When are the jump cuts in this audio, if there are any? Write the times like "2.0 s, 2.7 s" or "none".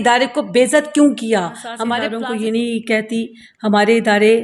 2.0 s